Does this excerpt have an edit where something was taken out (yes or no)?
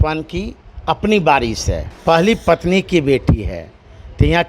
yes